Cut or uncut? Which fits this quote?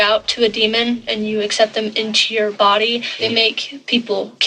cut